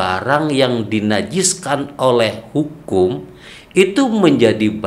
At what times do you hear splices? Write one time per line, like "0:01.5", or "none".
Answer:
none